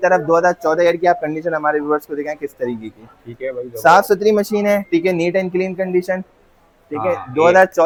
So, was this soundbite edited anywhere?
no; 0 cuts

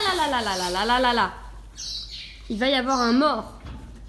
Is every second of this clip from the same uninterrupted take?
yes; 0 cuts

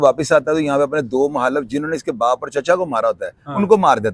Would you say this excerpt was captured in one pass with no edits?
yes; 0 cuts

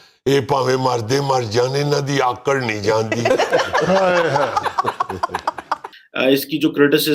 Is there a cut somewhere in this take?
yes; 1 cut; at 6.0 s

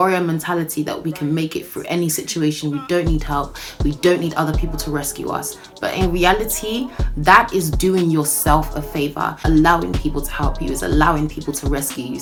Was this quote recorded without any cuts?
yes; 0 cuts

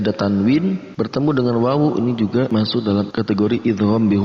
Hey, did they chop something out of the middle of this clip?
yes; 2 cuts; at 0.9 s, 2.7 s

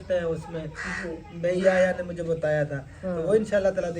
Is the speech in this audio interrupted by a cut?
no; 0 cuts

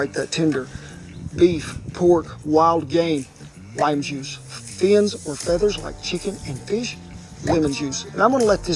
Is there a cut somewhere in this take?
yes; 1 cut; at 1.3 s

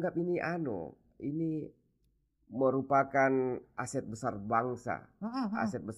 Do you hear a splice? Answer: no; 0 cuts

